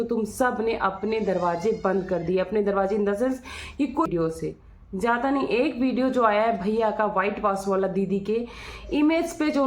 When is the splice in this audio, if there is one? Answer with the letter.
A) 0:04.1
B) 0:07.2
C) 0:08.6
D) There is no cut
A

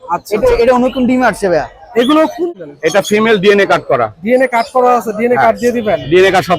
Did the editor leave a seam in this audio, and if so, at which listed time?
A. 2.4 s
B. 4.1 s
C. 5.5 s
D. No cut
A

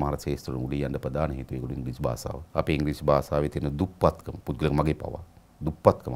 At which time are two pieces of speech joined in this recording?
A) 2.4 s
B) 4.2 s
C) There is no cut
A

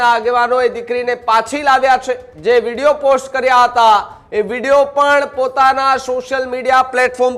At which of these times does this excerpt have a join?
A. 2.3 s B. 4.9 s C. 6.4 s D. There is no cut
A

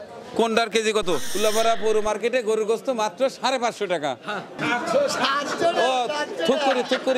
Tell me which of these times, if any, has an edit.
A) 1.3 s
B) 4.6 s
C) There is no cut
A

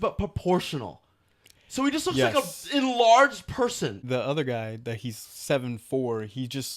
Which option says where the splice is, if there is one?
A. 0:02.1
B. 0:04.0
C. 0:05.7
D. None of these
B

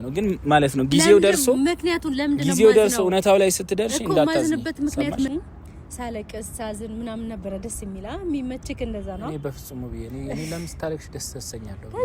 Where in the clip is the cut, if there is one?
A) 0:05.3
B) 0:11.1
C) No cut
A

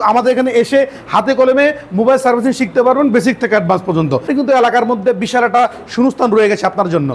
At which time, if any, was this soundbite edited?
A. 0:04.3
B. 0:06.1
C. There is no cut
A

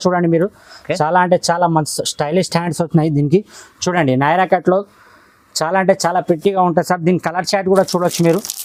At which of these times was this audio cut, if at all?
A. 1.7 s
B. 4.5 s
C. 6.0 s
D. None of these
D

